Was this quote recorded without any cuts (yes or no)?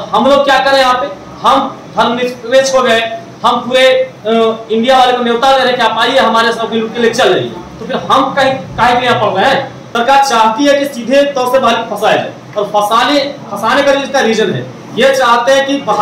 no